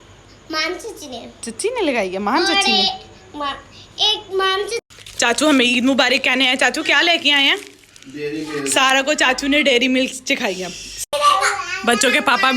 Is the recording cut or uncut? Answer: cut